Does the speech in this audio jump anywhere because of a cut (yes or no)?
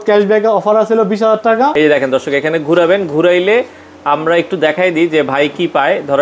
yes